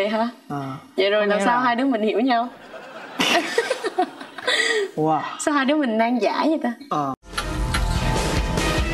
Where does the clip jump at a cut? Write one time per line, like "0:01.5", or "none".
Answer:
0:07.1